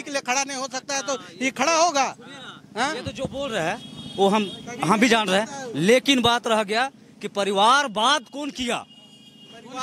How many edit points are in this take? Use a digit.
0